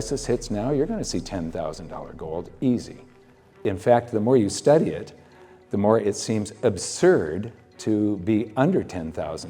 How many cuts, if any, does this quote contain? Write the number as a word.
one